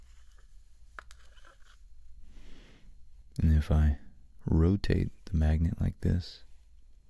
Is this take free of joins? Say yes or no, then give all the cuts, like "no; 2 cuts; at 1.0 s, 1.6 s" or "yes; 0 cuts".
yes; 0 cuts